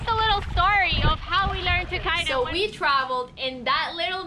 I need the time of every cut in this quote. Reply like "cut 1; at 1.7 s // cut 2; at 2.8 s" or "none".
cut 1; at 2.2 s